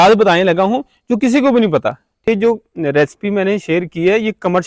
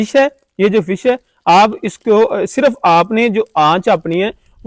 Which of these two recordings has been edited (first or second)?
first